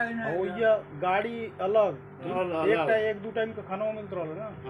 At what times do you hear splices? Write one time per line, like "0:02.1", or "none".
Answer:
0:02.3